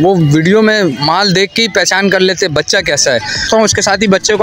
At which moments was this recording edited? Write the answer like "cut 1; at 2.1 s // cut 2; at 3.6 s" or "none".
cut 1; at 3.5 s